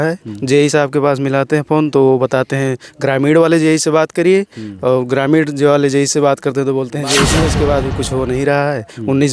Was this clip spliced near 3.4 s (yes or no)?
no